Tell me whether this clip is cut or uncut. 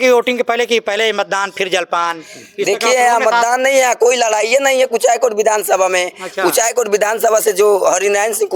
uncut